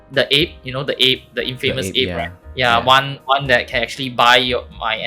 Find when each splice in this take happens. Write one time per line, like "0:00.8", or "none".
0:02.4